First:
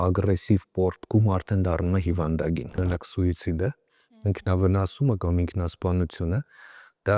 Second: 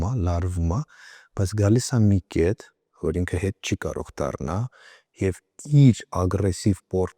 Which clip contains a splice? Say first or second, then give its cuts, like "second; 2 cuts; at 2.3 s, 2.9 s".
first; 1 cut; at 2.8 s